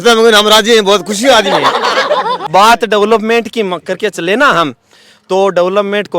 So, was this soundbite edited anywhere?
yes; 1 cut; at 2.4 s

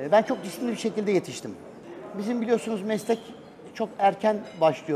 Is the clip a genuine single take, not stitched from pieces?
yes; 0 cuts

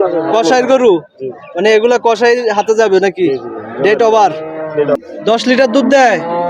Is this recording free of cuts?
no; 1 cut; at 5.0 s

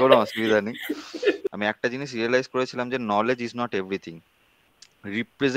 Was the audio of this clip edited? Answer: yes; 1 cut; at 1.4 s

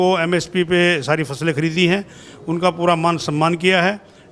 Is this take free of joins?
yes; 0 cuts

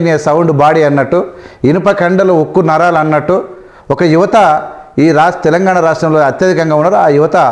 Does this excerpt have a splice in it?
no; 0 cuts

